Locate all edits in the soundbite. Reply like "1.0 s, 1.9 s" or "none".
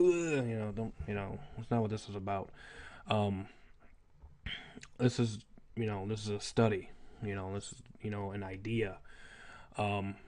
3.2 s